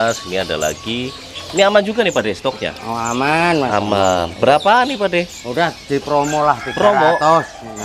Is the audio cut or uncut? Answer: uncut